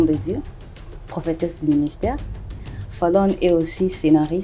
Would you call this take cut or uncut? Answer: uncut